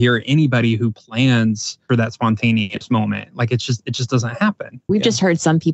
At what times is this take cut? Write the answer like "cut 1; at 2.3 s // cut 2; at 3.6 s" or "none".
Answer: cut 1; at 1.8 s // cut 2; at 4.8 s